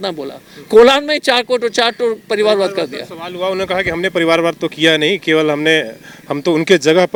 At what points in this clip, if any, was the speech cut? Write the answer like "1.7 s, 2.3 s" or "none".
none